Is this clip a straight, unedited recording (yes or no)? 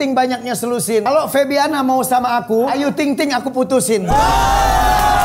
no